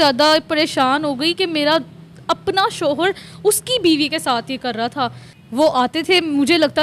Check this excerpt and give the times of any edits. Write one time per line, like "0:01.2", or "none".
0:05.3